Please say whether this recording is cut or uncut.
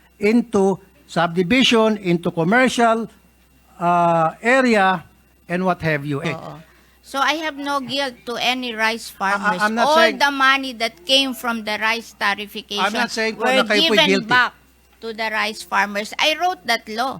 cut